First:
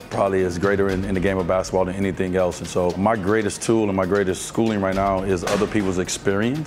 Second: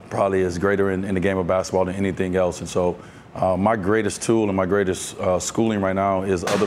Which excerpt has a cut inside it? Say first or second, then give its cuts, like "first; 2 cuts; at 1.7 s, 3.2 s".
first; 2 cuts; at 3.0 s, 4.5 s